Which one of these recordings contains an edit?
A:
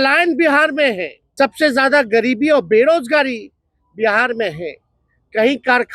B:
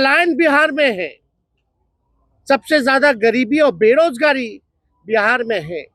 A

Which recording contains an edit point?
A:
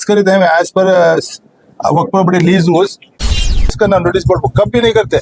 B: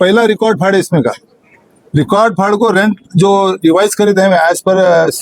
A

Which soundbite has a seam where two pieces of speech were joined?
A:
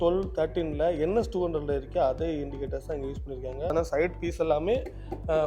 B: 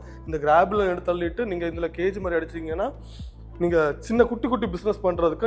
A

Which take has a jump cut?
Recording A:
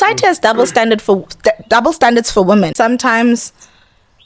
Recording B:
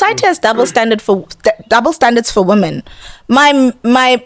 A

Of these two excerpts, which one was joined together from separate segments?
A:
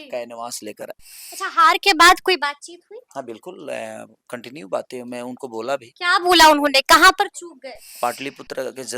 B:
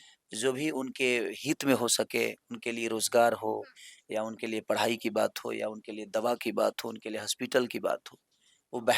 A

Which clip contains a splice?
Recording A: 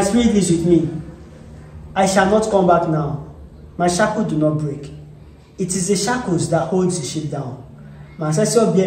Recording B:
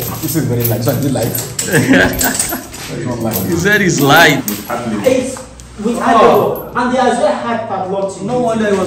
B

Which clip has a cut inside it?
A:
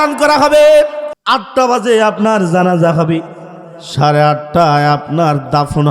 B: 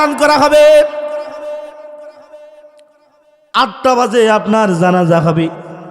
A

